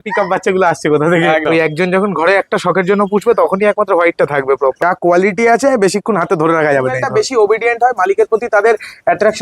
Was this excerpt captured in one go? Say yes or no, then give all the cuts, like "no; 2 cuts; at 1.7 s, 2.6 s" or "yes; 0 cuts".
no; 3 cuts; at 1.4 s, 4.8 s, 7.0 s